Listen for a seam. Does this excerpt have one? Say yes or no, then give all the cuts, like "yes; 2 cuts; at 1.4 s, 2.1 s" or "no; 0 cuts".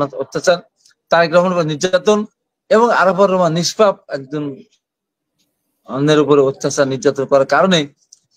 no; 0 cuts